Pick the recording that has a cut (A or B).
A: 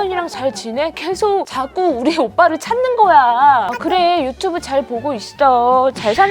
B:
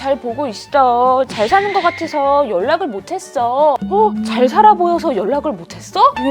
A